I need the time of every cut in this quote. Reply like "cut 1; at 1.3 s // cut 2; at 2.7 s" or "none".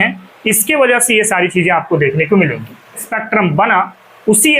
cut 1; at 3.1 s